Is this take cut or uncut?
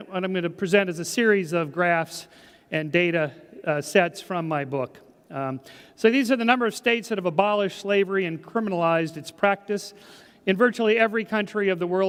uncut